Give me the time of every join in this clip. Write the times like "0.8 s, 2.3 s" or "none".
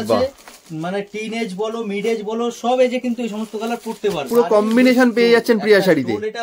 4.3 s